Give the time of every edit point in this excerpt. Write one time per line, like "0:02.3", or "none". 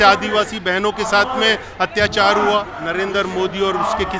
0:02.8